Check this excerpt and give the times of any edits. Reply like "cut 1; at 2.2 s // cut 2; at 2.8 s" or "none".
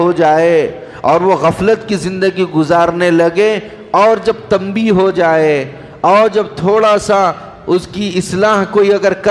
none